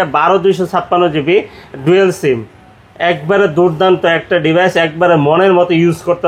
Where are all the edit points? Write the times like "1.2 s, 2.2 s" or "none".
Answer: none

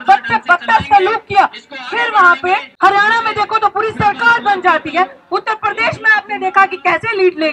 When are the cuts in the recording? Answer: 2.7 s

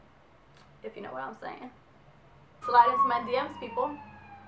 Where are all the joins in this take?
2.5 s

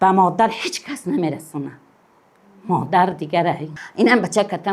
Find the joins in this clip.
3.8 s

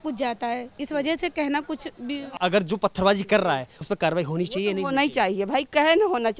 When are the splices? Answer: 2.4 s

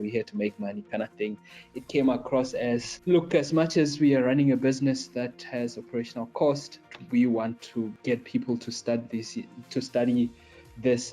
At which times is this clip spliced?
2.9 s, 6.9 s, 8.0 s

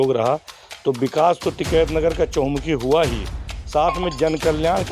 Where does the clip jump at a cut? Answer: none

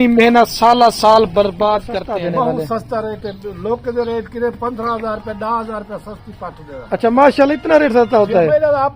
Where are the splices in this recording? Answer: 1.9 s

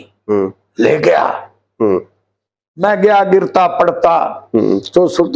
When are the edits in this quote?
none

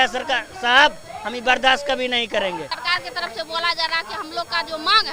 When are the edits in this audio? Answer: 2.7 s

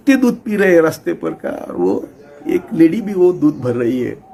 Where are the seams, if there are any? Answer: none

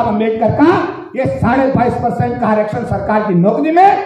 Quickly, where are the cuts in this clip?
none

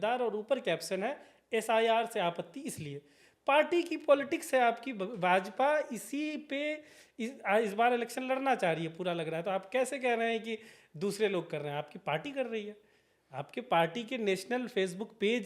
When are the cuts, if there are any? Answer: none

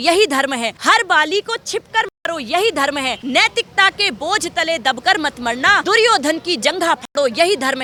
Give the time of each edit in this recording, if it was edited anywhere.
none

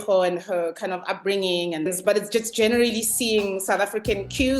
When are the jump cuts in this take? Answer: 1.9 s

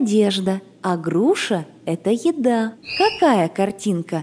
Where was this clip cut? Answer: 2.8 s

